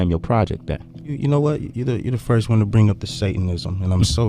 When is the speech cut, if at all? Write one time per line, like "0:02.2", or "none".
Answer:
0:01.0